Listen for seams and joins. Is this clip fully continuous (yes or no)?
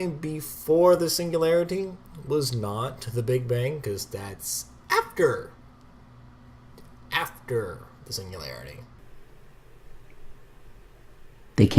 no